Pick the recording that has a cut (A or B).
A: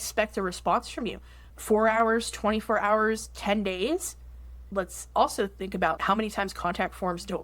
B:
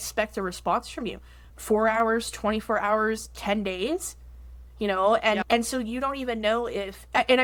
A